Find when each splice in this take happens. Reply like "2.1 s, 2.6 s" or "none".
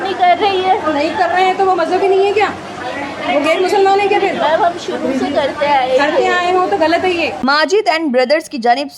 7.4 s